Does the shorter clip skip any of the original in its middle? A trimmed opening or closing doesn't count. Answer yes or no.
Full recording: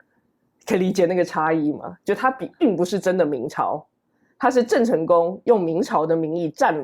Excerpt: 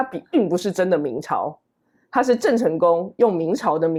no